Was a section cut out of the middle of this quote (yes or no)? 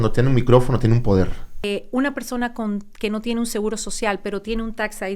yes